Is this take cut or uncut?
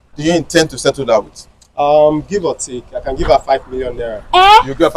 uncut